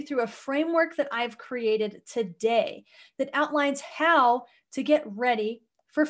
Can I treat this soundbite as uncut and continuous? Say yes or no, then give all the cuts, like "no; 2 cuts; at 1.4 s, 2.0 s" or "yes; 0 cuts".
yes; 0 cuts